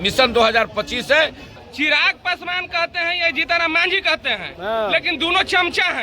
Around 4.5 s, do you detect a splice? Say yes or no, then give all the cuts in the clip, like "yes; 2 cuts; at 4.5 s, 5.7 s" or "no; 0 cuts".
no; 1 cut; at 1.5 s